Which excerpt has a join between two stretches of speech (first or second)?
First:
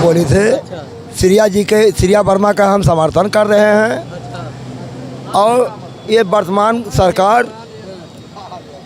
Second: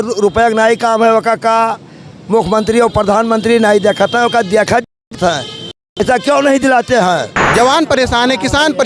second